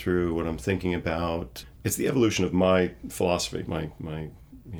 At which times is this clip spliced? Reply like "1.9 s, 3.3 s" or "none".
1.7 s, 3.8 s